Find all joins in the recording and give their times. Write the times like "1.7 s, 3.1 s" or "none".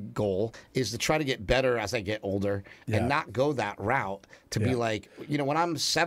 none